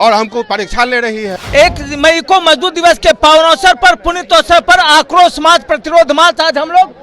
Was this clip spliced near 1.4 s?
yes; 1 cut; at 1.4 s

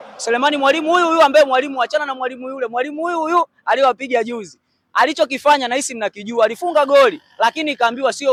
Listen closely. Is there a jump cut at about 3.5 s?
no; 0 cuts

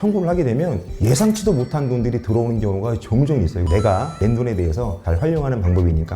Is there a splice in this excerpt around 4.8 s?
no; 1 cut; at 3.6 s

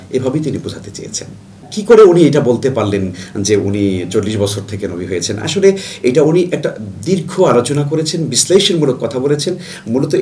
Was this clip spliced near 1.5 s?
yes; 1 cut; at 1.5 s

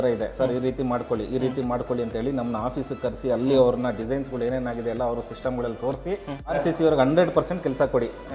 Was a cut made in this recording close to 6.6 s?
yes; 1 cut; at 6.6 s

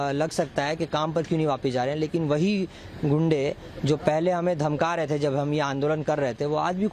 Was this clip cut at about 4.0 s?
no; 0 cuts

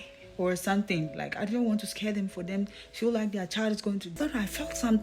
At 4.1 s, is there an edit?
yes; 1 cut; at 4.1 s

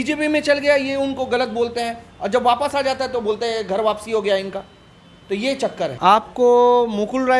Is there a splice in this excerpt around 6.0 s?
yes; 1 cut; at 6.0 s

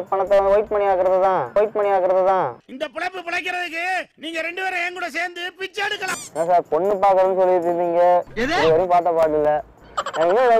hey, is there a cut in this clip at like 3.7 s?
no; 3 cuts; at 1.5 s, 6.3 s, 9.7 s

